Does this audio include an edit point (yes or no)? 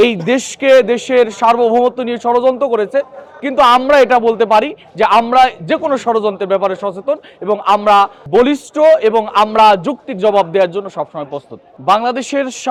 no